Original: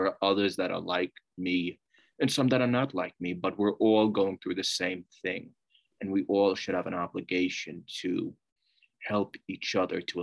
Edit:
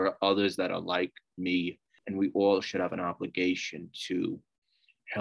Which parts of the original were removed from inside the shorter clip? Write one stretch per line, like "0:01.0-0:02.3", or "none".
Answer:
0:01.9-0:05.8